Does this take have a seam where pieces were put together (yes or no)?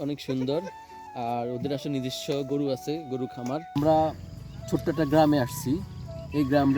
yes